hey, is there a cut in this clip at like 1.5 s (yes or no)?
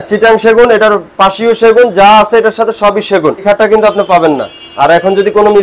no